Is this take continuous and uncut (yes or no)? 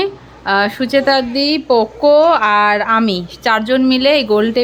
yes